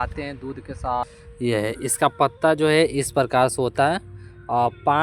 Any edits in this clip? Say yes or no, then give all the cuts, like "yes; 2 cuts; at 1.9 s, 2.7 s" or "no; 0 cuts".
yes; 1 cut; at 1.2 s